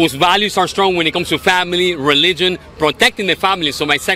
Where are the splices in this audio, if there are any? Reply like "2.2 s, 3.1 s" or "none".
none